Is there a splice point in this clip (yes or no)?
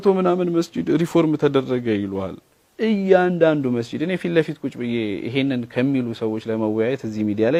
no